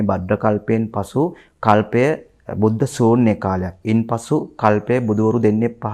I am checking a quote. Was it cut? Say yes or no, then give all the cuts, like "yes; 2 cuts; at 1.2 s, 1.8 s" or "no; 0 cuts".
no; 0 cuts